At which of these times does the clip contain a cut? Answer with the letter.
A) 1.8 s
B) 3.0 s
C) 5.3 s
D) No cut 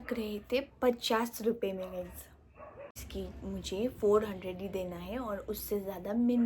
B